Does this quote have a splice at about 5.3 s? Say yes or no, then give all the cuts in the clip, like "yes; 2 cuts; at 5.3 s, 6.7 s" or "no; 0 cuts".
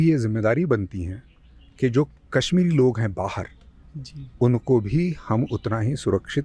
no; 0 cuts